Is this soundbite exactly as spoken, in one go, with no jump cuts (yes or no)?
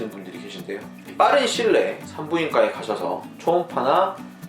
no